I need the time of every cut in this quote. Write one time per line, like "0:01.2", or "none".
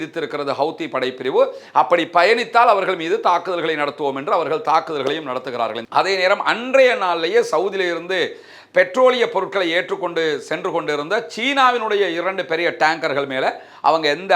0:05.9